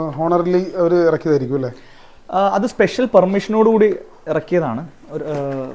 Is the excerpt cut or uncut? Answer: uncut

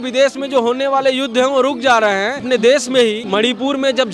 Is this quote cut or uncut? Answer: cut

